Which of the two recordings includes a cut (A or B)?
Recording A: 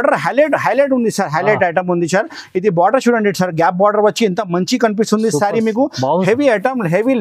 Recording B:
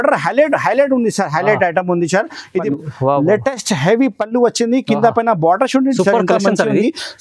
B